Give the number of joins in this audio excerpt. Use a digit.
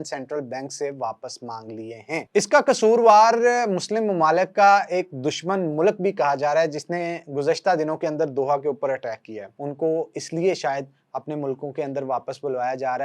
2